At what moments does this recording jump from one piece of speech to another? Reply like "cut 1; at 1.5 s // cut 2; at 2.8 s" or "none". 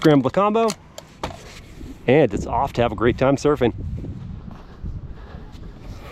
none